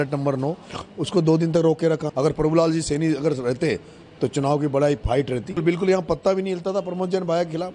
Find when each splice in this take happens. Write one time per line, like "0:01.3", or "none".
0:02.1
0:05.6